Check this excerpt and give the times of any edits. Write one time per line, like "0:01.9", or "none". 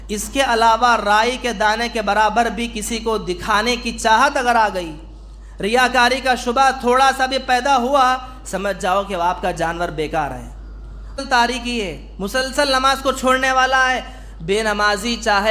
0:11.2